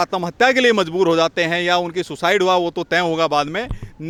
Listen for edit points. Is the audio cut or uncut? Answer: uncut